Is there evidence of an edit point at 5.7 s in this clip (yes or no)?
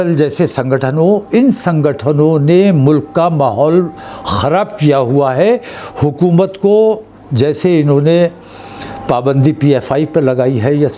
no